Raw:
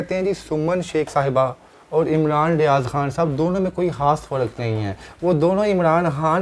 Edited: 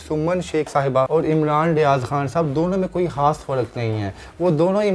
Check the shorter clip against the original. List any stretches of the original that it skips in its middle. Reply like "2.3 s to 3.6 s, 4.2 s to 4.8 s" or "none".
1.5 s to 1.9 s

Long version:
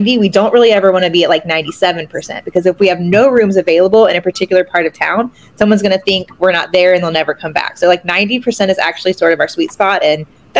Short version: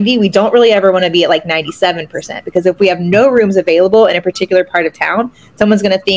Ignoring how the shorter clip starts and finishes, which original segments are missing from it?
none

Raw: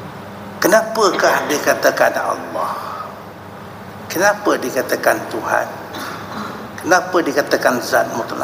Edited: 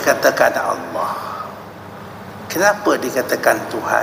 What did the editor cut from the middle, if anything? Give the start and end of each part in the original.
none

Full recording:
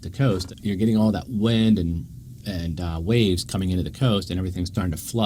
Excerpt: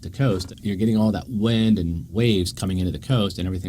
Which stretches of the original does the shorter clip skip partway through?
2.0 s to 3.0 s

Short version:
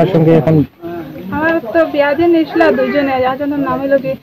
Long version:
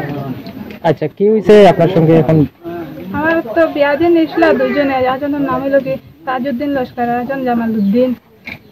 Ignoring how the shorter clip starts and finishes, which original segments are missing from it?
none

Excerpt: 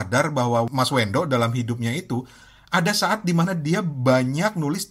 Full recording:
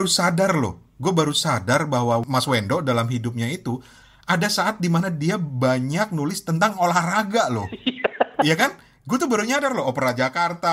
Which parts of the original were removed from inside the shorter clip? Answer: none

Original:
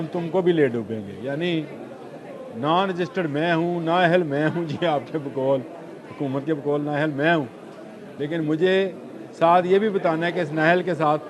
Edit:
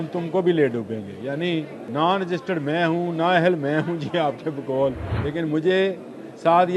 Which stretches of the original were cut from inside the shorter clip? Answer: 1.8 s to 2.5 s, 5.8 s to 8.1 s

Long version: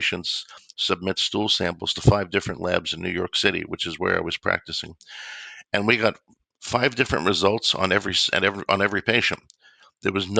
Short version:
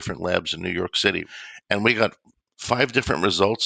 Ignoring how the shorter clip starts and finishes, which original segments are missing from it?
3.7 s to 5.3 s

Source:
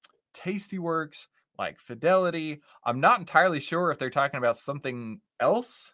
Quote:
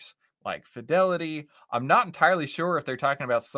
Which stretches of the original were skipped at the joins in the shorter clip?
none

